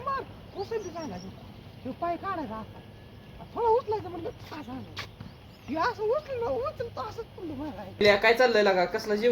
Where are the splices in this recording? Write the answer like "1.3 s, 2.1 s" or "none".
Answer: 8.0 s